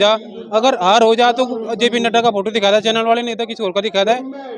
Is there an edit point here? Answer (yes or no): no